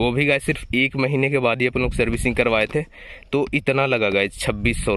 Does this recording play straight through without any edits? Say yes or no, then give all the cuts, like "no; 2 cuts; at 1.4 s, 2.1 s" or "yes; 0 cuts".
yes; 0 cuts